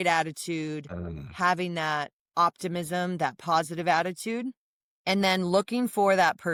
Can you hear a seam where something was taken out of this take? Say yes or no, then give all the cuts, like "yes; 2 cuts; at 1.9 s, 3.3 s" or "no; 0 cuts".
no; 0 cuts